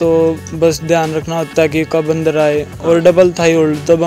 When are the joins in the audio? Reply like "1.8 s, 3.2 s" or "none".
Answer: none